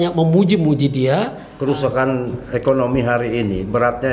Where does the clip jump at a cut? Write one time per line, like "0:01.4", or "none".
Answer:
0:01.5